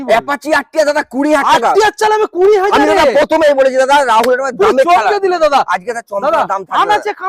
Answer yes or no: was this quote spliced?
no